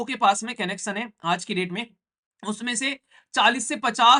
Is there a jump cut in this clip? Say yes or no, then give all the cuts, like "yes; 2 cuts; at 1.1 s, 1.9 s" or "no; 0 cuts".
no; 0 cuts